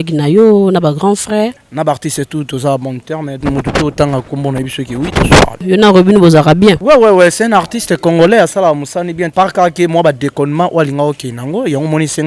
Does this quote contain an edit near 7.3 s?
no; 4 cuts; at 1.6 s, 3.4 s, 5.6 s, 9.3 s

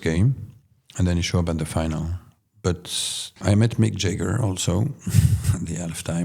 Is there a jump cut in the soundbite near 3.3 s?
yes; 1 cut; at 3.3 s

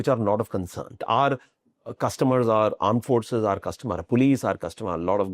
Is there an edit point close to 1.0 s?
yes; 1 cut; at 1.0 s

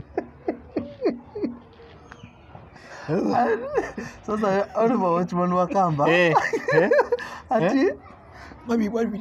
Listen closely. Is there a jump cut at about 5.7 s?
no; 0 cuts

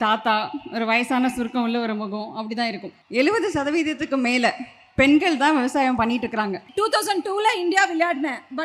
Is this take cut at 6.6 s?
yes; 2 cuts; at 2.9 s, 6.6 s

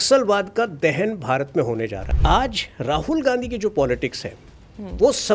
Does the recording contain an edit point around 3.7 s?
no; 1 cut; at 2.0 s

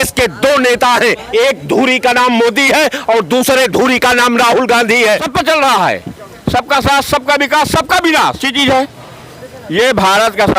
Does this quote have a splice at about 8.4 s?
yes; 2 cuts; at 5.3 s, 8.4 s

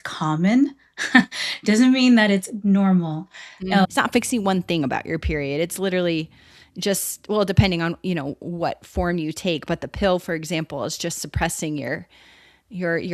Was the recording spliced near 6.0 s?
no; 1 cut; at 3.9 s

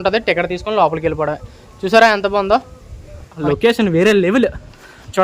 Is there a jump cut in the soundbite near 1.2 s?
no; 1 cut; at 3.4 s

